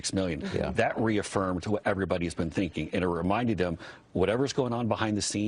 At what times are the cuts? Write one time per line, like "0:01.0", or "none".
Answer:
0:02.7